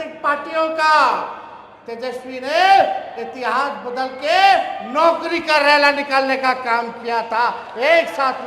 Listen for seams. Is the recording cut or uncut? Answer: uncut